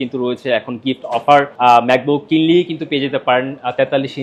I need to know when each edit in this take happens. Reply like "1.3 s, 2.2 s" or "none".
1.5 s

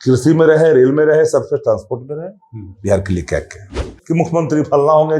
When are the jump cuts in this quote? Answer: 4.0 s

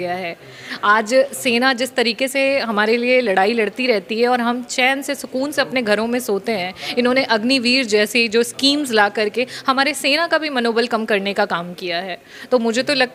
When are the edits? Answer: none

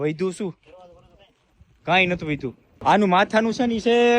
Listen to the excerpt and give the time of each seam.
2.7 s

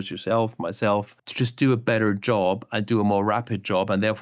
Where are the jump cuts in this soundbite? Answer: 1.2 s

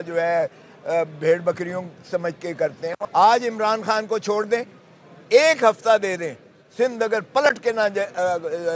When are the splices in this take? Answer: 3.0 s

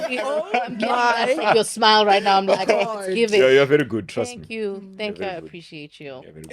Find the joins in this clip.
none

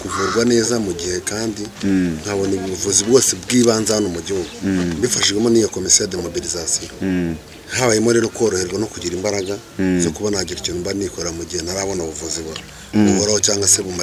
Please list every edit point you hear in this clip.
none

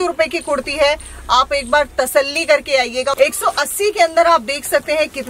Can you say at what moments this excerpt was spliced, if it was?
3.1 s

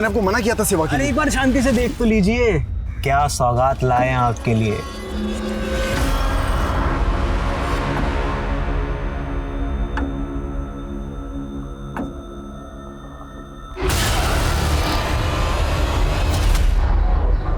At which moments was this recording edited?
16.6 s

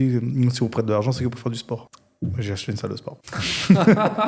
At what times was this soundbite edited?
2.0 s, 3.2 s

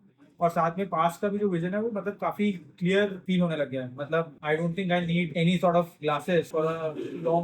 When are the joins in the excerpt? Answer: 3.2 s, 4.4 s, 5.3 s, 6.5 s

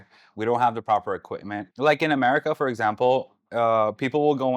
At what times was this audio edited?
1.6 s

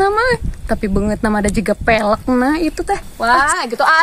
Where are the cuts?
3.1 s

